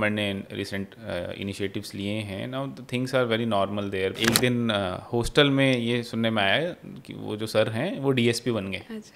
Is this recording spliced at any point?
yes; 1 cut; at 4.2 s

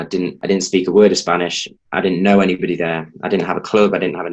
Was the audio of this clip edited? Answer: no; 0 cuts

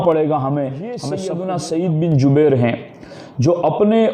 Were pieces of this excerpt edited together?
yes; 1 cut; at 1.0 s

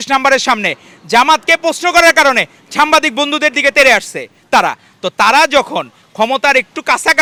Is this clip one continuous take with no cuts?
yes; 0 cuts

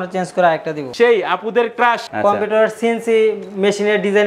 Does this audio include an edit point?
yes; 2 cuts; at 0.9 s, 2.1 s

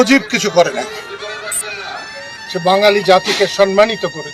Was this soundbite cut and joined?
no; 0 cuts

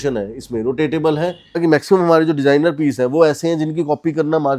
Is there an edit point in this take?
yes; 1 cut; at 1.6 s

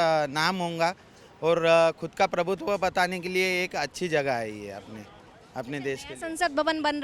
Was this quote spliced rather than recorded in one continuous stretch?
no; 0 cuts

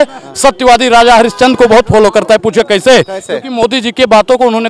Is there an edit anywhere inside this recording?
no; 0 cuts

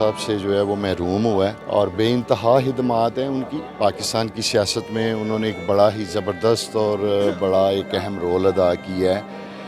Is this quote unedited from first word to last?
yes; 0 cuts

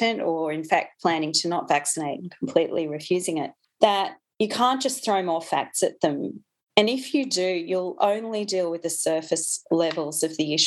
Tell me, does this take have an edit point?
yes; 1 cut; at 3.6 s

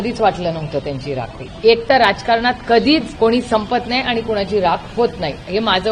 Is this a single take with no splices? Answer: no; 2 cuts; at 1.5 s, 3.1 s

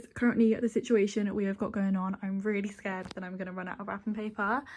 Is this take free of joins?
yes; 0 cuts

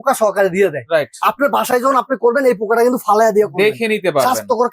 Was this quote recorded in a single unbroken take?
yes; 0 cuts

